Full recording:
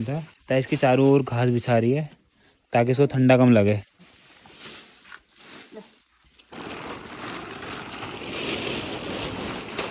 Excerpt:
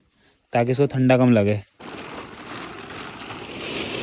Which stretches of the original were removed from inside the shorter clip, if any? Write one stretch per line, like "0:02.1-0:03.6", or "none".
0:03.9-0:06.4